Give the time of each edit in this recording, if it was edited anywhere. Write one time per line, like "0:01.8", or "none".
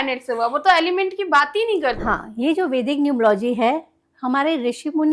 0:02.0